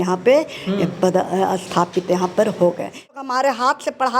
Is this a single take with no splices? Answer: no; 1 cut; at 3.1 s

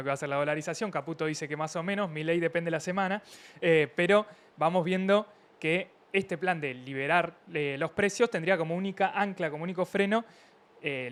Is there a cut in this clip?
no; 0 cuts

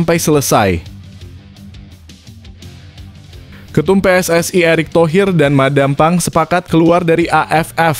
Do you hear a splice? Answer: yes; 2 cuts; at 1.4 s, 3.7 s

